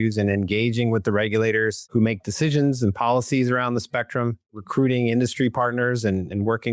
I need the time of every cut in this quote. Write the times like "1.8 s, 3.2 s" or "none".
1.9 s, 4.6 s